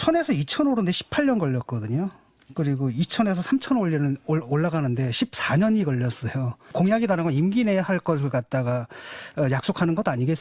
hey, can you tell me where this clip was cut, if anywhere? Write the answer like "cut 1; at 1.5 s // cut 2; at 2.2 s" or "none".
cut 1; at 6.7 s

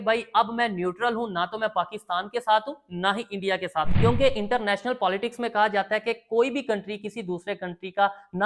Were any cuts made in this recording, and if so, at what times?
cut 1; at 3.9 s

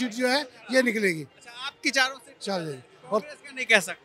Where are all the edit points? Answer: none

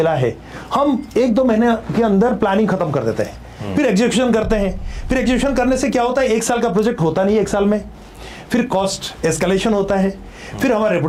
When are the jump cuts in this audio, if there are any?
none

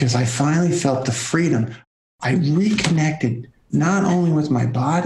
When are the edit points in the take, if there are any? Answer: cut 1; at 1.9 s

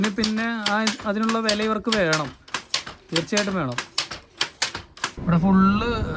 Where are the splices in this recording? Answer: cut 1; at 5.1 s

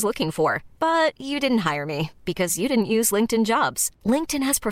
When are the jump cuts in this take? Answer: none

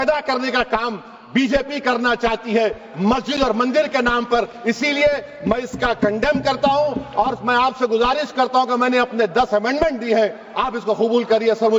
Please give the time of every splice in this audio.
none

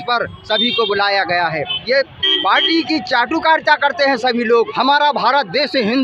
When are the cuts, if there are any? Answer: cut 1; at 1.7 s // cut 2; at 4.7 s

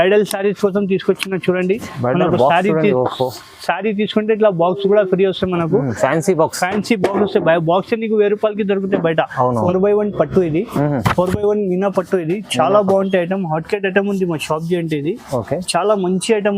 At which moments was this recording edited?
cut 1; at 9.7 s

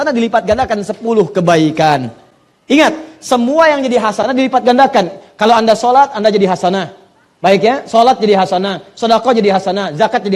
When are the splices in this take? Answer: none

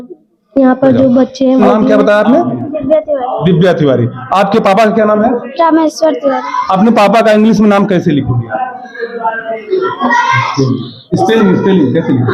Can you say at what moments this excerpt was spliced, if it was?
cut 1; at 1.6 s

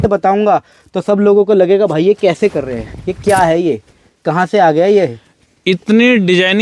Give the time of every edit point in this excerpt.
none

